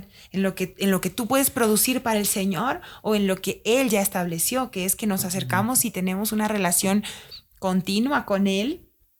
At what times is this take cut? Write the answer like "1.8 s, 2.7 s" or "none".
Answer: none